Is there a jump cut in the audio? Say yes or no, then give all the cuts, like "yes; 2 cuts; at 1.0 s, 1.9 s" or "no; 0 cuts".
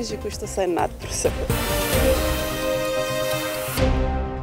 yes; 1 cut; at 1.5 s